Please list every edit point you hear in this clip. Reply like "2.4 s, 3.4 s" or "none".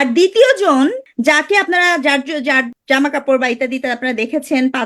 1.1 s, 2.7 s